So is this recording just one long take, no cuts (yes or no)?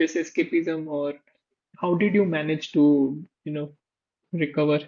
yes